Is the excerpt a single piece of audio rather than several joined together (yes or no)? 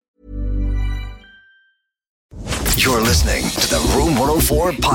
no